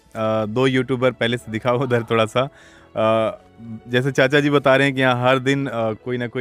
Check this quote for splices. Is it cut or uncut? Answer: uncut